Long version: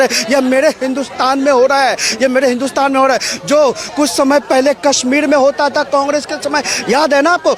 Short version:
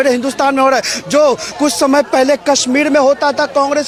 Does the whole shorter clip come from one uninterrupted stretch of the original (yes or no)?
yes